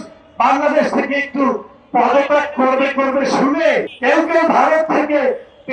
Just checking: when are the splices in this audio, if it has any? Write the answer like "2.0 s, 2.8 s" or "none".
3.9 s

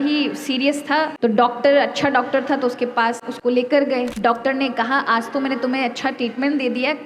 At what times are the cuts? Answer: 1.1 s, 3.3 s, 4.1 s

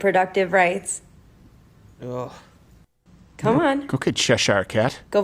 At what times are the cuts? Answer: none

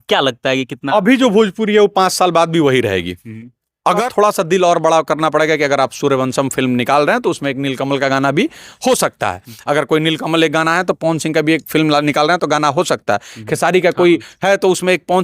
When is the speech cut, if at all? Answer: 4.0 s

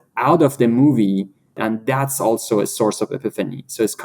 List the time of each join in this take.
1.6 s

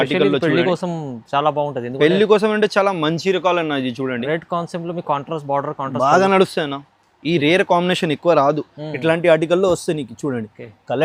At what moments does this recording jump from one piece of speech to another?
none

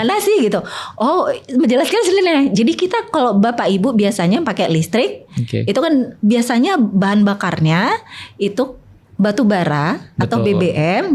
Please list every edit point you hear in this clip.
none

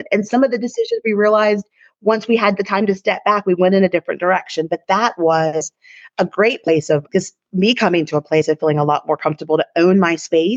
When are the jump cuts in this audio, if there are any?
7.1 s

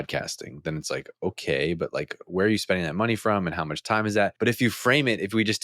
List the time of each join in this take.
4.3 s

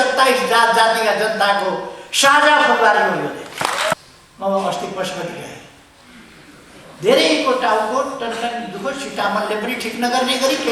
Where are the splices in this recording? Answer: 3.9 s

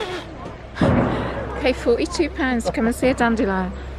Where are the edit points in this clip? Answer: none

